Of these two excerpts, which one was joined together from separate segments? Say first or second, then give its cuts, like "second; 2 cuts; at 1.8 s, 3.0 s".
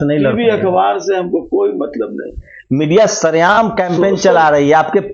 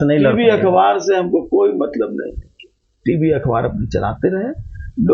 first; 1 cut; at 2.5 s